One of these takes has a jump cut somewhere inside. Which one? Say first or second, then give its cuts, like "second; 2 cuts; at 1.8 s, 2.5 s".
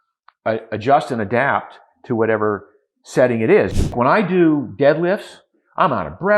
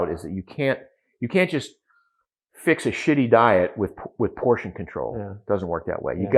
first; 1 cut; at 3.8 s